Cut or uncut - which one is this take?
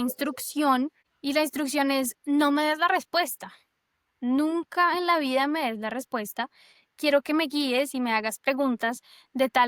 cut